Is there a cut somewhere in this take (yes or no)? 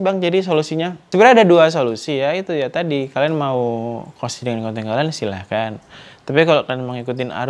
yes